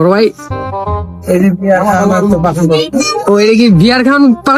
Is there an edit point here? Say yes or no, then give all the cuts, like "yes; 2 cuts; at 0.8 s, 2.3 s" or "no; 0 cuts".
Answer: no; 0 cuts